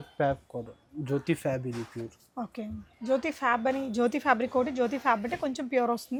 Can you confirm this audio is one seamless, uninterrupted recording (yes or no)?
yes